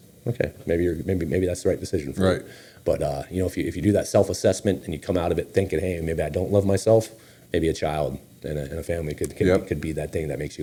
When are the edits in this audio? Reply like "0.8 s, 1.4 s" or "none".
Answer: none

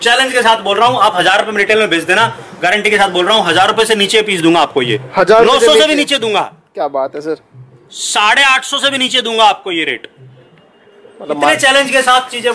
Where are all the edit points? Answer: none

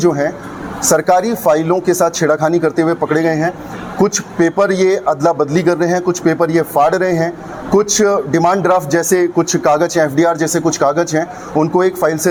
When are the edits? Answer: none

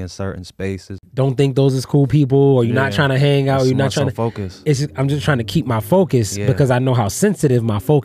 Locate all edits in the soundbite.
1.0 s

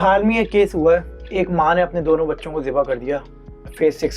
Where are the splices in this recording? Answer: none

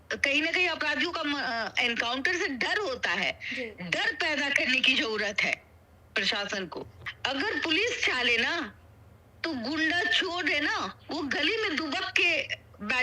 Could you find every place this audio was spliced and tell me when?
6.9 s

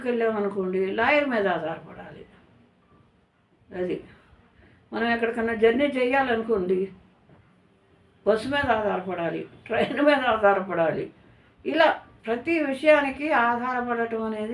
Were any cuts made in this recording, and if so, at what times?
none

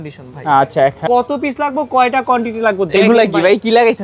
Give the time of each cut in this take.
1.0 s

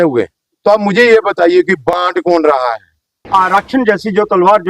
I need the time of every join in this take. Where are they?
3.2 s

